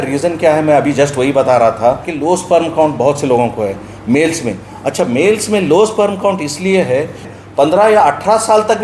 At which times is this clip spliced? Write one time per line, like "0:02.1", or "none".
0:02.1
0:07.3